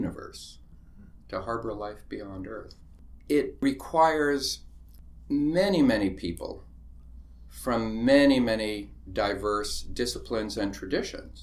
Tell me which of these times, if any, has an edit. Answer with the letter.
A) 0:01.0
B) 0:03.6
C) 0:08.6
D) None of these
B